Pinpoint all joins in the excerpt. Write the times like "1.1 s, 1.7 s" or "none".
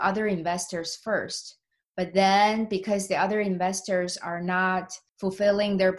5.0 s